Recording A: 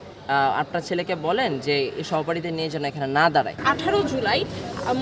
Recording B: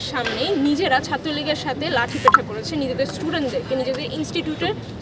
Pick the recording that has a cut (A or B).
A